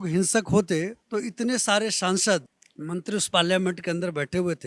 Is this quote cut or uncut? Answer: cut